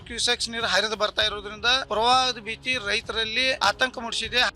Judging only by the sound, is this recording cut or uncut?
cut